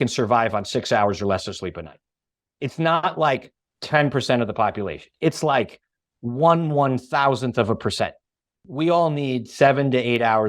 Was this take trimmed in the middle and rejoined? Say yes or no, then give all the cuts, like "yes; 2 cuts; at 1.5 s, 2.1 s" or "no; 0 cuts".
yes; 1 cut; at 8.6 s